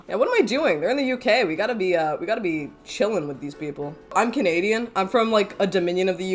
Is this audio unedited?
no; 1 cut; at 4.0 s

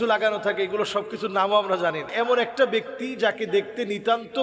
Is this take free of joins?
no; 1 cut; at 2.1 s

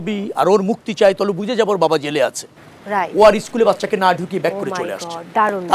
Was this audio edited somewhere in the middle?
no; 0 cuts

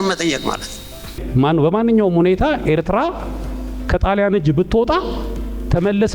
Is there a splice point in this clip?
yes; 1 cut; at 1.2 s

